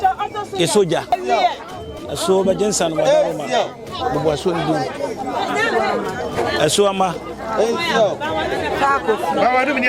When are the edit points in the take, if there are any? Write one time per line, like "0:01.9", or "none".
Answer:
0:01.1